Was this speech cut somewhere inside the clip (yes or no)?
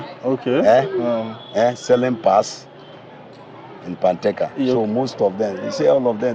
no